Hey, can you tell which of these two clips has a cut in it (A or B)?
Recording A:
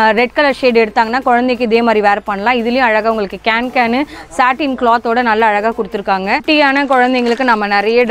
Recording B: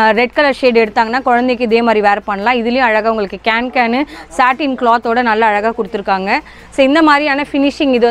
A